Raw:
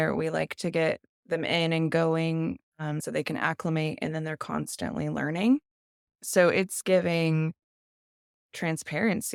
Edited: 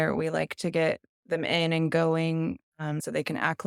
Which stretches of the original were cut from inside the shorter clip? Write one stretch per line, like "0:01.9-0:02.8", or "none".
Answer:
none